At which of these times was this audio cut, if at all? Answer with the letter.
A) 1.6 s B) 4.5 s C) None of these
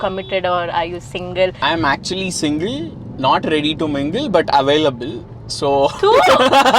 A